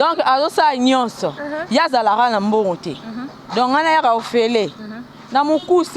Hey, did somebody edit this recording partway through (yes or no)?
no